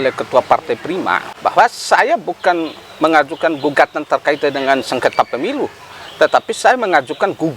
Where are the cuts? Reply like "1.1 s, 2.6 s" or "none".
1.3 s